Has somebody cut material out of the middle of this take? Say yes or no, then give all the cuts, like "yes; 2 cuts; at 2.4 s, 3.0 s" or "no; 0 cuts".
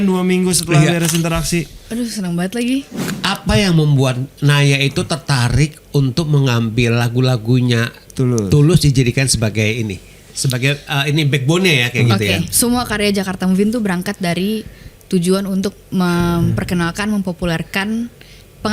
yes; 2 cuts; at 3.0 s, 12.5 s